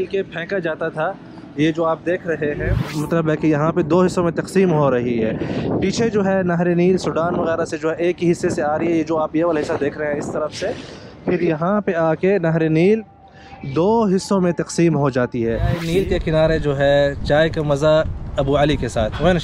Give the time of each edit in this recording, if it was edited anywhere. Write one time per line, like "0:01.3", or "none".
0:02.8
0:15.8

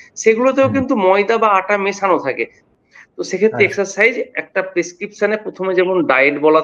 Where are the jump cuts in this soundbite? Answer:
0:02.7

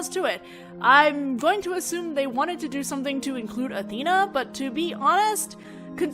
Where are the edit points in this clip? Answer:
0:01.6

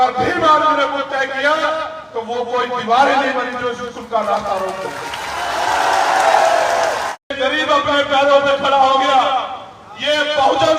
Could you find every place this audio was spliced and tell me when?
0:07.4

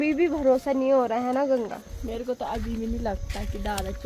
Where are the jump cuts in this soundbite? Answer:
0:01.9

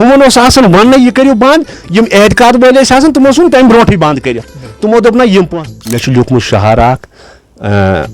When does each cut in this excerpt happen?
0:05.5

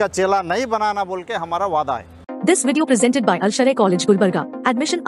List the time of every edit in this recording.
0:02.2

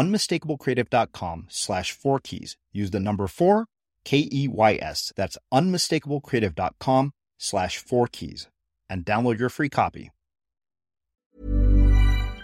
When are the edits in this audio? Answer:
0:11.3

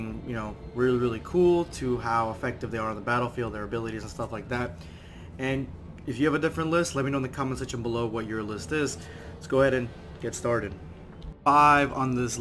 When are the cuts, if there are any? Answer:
none

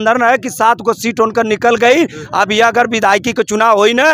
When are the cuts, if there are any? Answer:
none

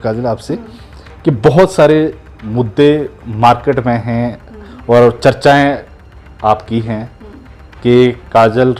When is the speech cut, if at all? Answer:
none

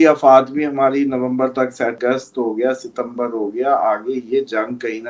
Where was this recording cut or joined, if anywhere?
0:02.0

